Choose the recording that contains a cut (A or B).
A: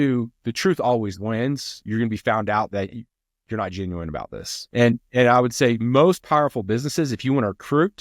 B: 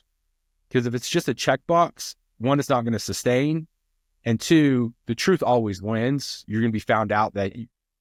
A